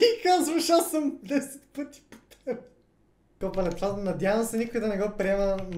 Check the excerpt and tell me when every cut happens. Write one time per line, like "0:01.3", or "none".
0:03.2